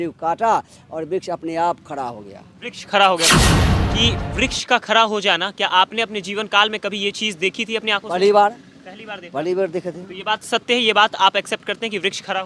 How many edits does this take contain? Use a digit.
1